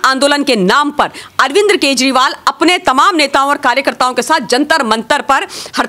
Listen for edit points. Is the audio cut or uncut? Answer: uncut